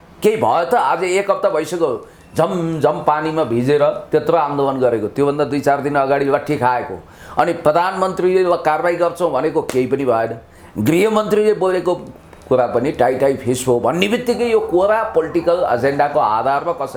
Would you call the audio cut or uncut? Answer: uncut